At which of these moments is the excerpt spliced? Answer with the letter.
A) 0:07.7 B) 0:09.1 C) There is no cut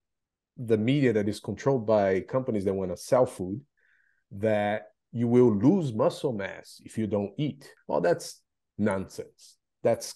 A